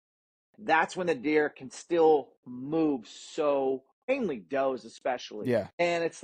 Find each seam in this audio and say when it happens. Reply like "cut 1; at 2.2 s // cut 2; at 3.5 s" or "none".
cut 1; at 4.1 s // cut 2; at 5.3 s